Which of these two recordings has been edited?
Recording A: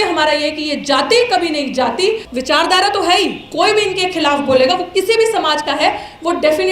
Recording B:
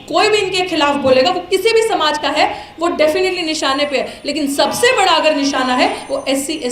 A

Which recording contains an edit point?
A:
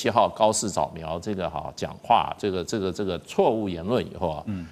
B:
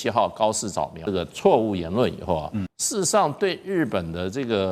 B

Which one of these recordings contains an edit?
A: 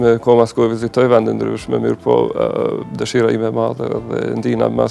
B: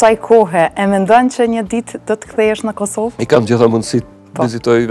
B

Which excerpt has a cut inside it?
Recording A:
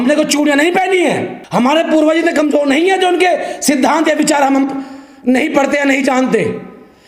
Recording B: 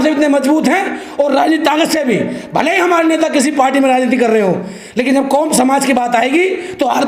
A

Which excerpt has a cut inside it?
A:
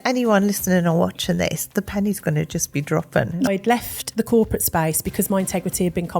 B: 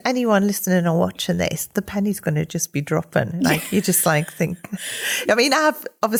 A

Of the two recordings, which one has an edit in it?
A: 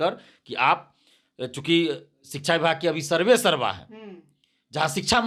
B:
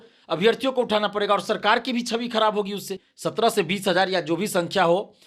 B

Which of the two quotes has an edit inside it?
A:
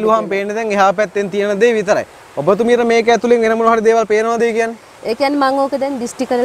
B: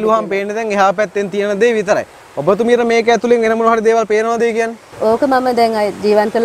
B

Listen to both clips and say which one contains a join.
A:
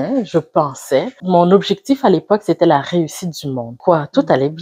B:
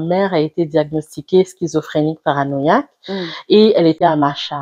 A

